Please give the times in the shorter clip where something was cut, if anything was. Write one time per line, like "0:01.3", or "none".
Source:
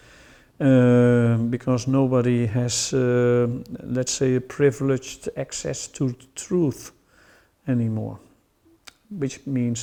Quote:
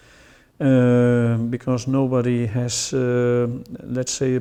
none